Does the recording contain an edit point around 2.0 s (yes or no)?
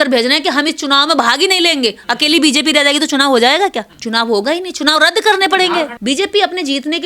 no